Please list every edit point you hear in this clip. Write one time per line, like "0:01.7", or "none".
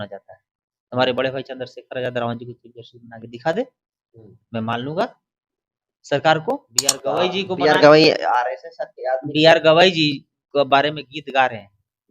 0:06.9